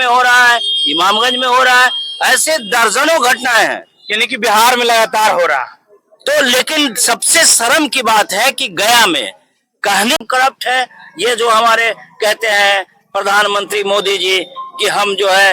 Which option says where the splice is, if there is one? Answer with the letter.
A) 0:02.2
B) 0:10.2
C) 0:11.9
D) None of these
B